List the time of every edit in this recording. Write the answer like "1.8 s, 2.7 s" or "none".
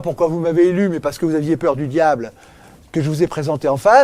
none